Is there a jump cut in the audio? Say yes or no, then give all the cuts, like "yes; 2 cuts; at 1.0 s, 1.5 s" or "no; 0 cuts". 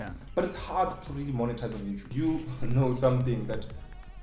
yes; 1 cut; at 2.1 s